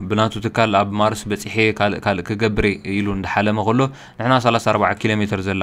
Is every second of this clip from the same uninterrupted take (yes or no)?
yes